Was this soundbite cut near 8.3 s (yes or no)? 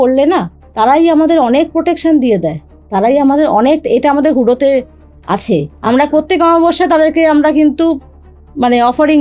no